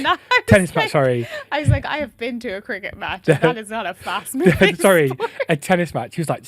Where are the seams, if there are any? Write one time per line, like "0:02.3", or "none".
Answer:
none